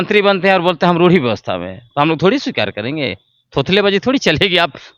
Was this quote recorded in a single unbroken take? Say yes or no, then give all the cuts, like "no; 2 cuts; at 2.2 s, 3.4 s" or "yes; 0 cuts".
yes; 0 cuts